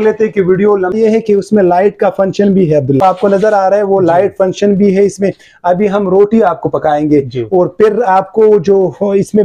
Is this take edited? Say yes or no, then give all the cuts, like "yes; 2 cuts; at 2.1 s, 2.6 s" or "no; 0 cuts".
yes; 2 cuts; at 0.9 s, 3.0 s